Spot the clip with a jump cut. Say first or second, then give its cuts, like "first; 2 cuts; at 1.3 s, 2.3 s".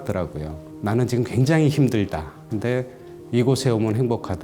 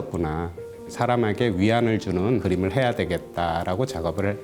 second; 2 cuts; at 0.8 s, 2.4 s